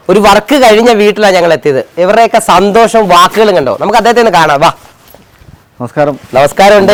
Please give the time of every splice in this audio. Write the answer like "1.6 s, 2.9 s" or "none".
none